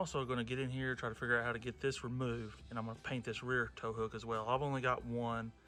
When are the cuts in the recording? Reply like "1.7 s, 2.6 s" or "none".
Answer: none